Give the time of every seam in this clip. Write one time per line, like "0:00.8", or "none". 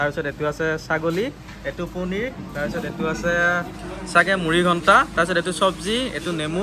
none